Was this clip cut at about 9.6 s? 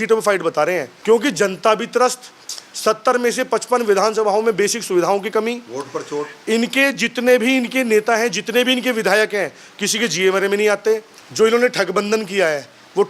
no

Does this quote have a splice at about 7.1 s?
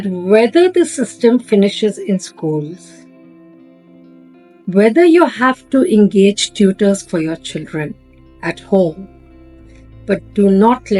no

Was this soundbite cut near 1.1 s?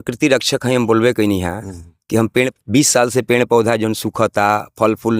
no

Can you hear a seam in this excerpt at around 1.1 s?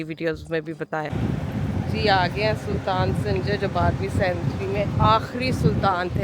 yes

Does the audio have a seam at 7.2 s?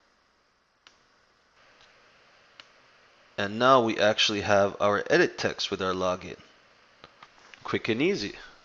no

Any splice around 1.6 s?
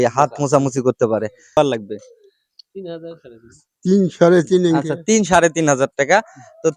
yes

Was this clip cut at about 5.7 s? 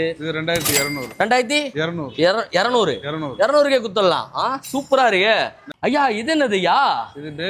yes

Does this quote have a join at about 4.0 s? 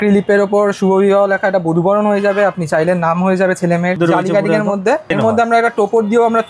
yes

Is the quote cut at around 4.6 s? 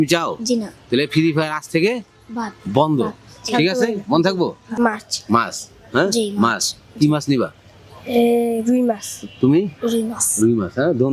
yes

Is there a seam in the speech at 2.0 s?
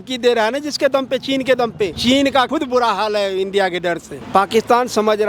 yes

